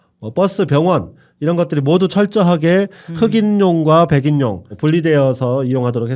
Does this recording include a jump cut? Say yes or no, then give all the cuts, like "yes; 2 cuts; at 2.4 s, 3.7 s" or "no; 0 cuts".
yes; 1 cut; at 4.7 s